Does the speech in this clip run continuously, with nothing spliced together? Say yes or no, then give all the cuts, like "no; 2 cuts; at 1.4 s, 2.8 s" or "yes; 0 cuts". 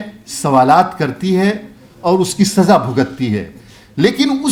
yes; 0 cuts